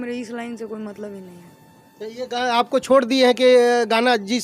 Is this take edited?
no; 0 cuts

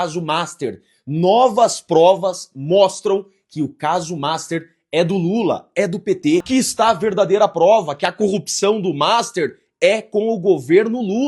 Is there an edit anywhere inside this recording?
yes; 1 cut; at 6.5 s

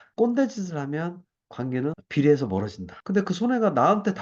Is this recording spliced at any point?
no; 0 cuts

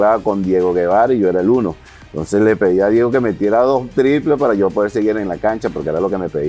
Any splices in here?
no; 0 cuts

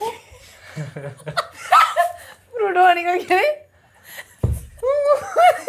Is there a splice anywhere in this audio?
no; 0 cuts

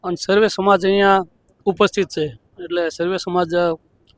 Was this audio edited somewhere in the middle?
no; 0 cuts

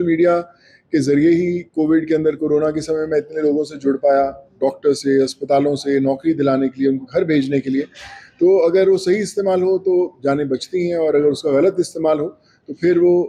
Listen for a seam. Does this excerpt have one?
no; 0 cuts

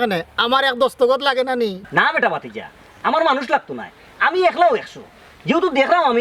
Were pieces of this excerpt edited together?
yes; 1 cut; at 1.8 s

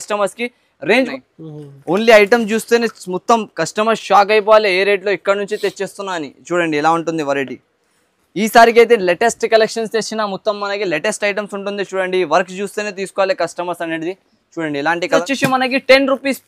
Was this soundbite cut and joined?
yes; 2 cuts; at 1.1 s, 15.2 s

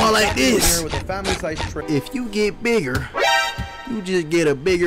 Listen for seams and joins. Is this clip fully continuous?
no; 1 cut; at 1.8 s

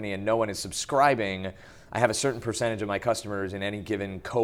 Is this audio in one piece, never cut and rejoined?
yes; 0 cuts

